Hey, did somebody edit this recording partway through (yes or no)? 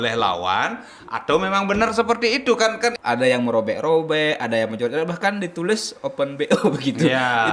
yes